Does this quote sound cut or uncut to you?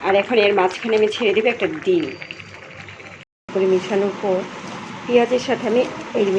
cut